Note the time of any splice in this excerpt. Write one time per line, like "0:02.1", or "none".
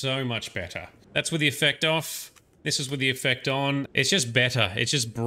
0:00.9
0:03.9